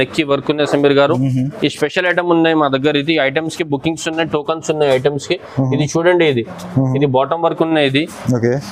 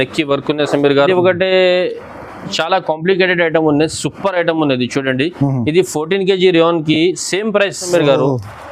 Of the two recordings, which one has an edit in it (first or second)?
second